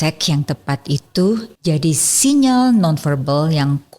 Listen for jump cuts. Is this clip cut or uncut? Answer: cut